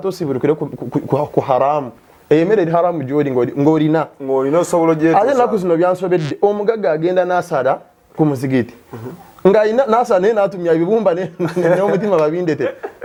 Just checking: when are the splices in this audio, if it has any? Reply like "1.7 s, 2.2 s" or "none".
none